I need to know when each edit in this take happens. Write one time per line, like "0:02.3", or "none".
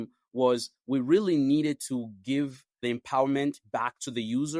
0:02.7